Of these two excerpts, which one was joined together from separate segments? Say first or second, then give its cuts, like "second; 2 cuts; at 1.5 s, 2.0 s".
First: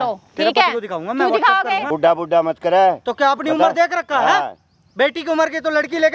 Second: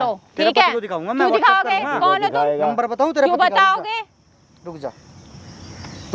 first; 1 cut; at 1.9 s